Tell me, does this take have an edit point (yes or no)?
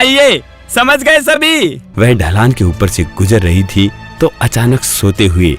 yes